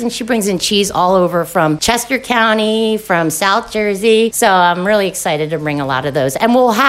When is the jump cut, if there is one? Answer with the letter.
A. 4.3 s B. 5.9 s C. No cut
A